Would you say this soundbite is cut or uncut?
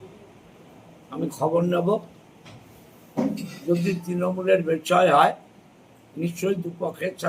uncut